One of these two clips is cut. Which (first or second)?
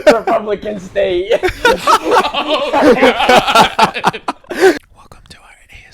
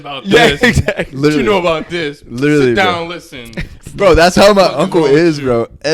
first